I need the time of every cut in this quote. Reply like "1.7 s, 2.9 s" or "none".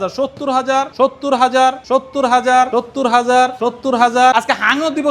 0.9 s, 1.8 s, 2.7 s, 3.6 s, 4.3 s

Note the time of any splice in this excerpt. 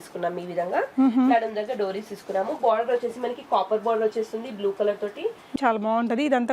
5.5 s

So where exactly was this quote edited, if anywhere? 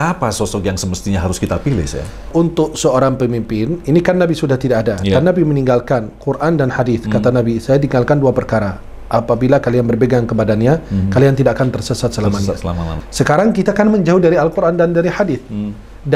2.3 s, 12.9 s

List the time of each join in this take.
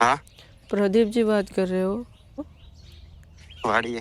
2.5 s

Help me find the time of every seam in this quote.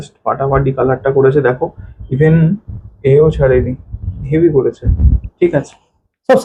none

